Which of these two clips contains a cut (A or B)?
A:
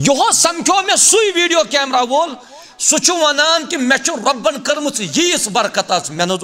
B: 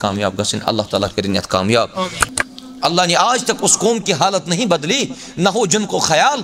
B